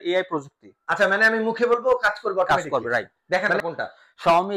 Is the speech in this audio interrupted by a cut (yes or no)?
yes